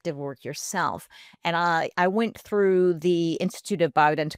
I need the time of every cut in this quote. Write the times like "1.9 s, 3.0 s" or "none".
none